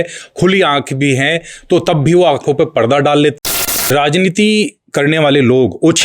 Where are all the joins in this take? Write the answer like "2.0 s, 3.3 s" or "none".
3.5 s